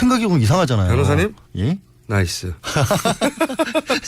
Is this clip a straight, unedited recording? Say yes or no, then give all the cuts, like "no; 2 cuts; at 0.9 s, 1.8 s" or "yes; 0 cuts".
no; 1 cut; at 2.1 s